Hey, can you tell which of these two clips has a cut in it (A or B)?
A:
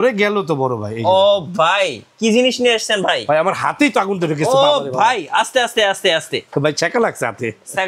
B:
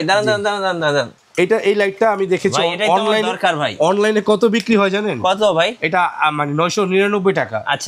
B